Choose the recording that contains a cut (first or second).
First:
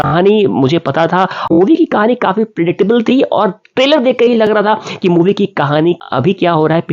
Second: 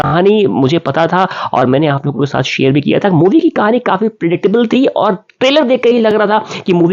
first